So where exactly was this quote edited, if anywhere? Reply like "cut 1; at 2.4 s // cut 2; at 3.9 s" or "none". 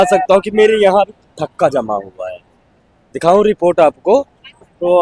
none

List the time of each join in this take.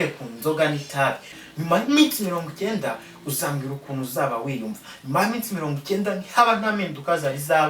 cut 1; at 1.3 s

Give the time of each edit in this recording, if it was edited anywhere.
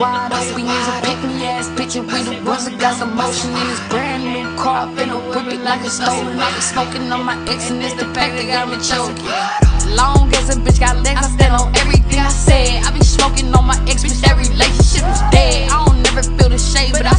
none

